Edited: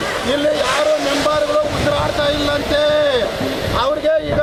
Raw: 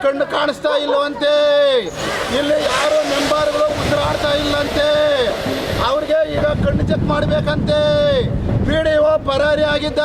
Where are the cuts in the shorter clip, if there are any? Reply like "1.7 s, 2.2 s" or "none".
none